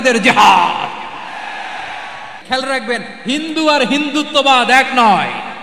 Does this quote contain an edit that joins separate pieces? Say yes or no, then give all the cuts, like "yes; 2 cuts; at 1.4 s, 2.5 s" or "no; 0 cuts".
yes; 1 cut; at 2.4 s